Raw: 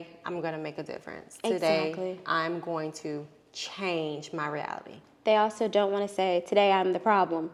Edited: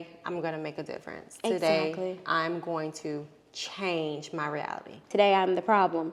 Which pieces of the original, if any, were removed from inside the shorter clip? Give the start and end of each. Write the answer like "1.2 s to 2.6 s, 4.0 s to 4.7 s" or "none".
5.1 s to 6.5 s